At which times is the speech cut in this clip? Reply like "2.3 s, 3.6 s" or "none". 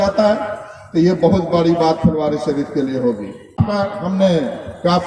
3.6 s